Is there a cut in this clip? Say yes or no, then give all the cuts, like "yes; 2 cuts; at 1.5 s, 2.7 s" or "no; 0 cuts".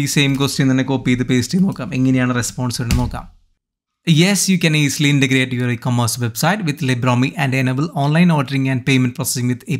no; 0 cuts